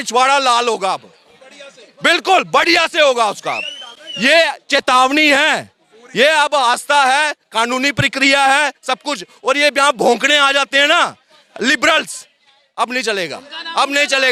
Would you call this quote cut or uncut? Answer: uncut